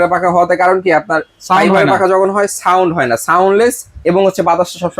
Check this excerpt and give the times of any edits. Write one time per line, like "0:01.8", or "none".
none